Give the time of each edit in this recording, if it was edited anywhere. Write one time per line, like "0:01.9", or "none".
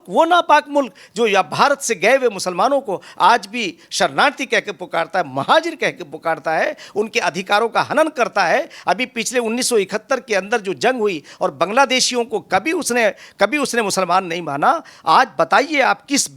none